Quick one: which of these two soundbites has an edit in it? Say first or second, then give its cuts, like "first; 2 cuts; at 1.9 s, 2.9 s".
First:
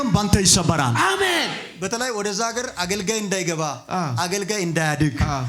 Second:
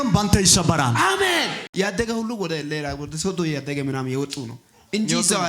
second; 1 cut; at 1.7 s